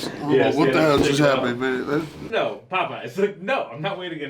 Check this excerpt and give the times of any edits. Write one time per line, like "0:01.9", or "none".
0:02.2